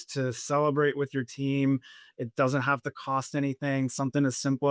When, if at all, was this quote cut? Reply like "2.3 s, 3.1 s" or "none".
none